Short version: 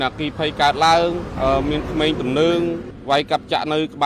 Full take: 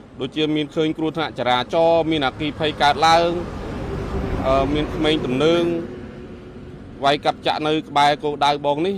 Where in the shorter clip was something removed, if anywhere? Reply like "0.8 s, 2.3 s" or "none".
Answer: 1.3 s, 2.9 s

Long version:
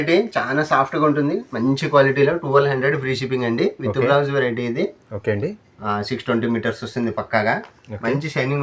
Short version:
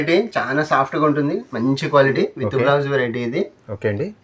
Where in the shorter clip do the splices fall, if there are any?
2.1 s

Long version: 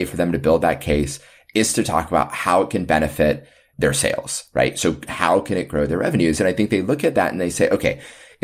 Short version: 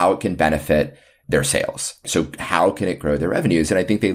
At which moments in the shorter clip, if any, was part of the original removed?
2.0 s

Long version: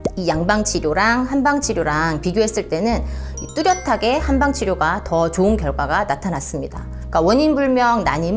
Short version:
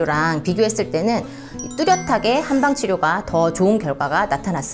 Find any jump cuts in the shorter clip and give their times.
none

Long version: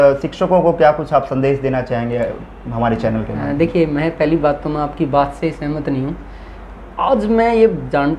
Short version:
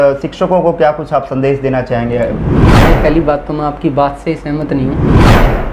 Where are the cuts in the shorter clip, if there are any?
2.8 s

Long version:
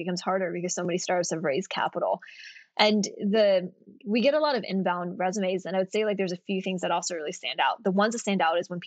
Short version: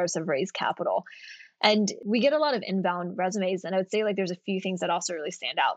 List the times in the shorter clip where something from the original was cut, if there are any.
2.0 s

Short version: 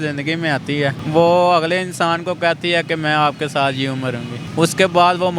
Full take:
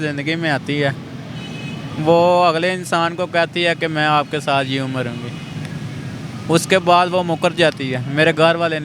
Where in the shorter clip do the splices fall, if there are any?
1.0 s, 4.4 s

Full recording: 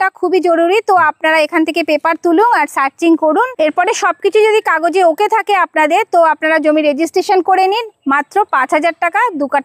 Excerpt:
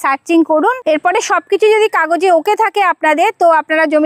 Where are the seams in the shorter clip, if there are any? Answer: none

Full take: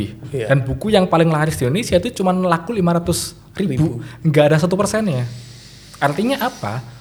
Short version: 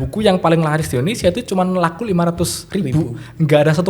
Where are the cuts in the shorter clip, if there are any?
2.6 s

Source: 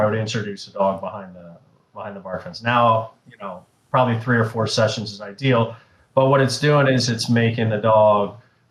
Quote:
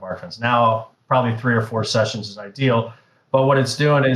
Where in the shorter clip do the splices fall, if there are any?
0.9 s

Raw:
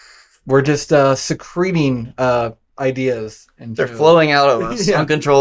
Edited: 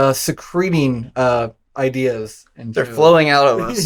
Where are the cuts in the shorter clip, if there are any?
none

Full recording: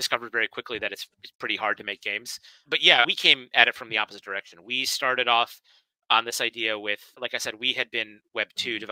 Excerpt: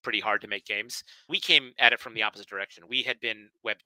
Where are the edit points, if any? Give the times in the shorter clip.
1.3 s, 2.9 s

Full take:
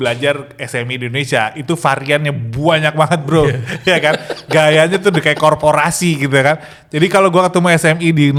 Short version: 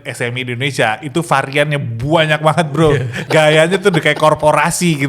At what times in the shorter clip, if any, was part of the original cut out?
3.1 s

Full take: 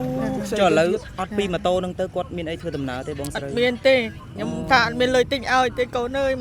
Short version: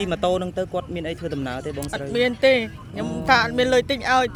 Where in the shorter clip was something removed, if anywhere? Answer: none

